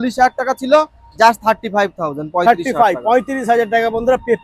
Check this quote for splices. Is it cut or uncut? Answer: uncut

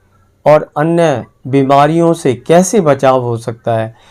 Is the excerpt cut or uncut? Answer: uncut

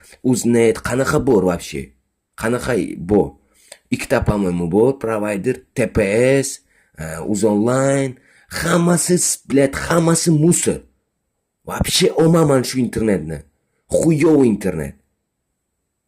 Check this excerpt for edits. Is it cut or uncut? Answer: uncut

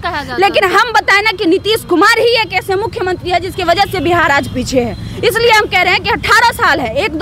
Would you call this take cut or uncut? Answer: uncut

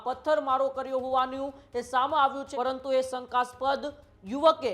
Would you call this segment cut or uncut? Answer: cut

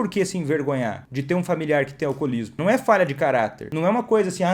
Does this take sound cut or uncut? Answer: cut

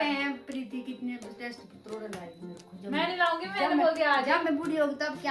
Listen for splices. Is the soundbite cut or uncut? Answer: uncut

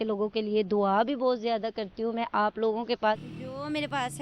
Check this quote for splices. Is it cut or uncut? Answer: cut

